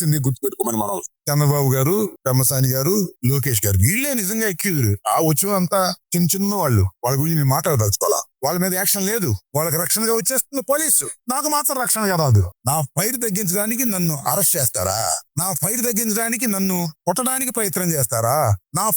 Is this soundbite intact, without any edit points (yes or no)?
no